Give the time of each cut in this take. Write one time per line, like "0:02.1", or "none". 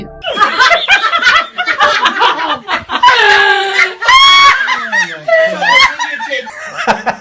none